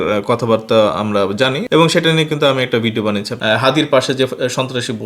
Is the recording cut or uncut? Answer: cut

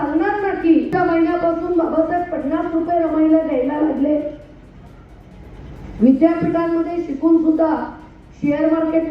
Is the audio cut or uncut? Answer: cut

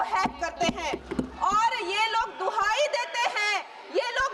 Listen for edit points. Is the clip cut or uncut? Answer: cut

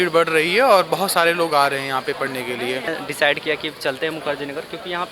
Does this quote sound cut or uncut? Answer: cut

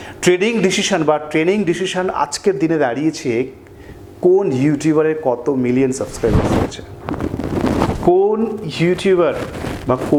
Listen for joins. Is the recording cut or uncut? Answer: uncut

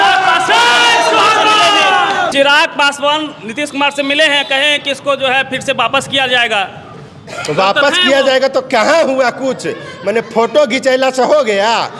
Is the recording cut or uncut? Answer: uncut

